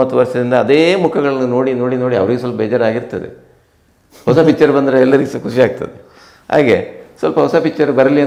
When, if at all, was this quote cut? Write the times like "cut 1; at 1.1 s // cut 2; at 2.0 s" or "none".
none